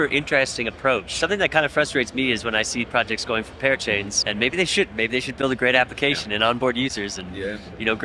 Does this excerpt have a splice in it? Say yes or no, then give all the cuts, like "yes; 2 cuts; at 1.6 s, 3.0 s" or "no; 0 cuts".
yes; 2 cuts; at 1.1 s, 4.2 s